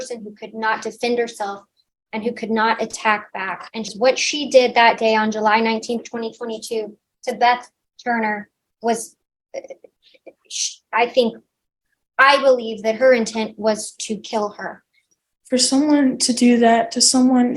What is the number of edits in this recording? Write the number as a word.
two